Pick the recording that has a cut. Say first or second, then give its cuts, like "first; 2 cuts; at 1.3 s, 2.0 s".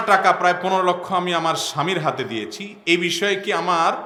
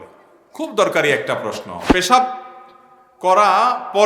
second; 1 cut; at 1.7 s